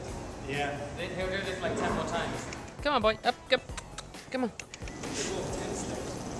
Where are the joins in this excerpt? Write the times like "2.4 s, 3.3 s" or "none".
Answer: none